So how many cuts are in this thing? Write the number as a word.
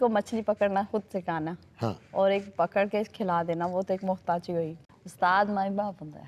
one